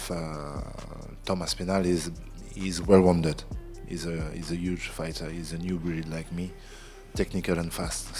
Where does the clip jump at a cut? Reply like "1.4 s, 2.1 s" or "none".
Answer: none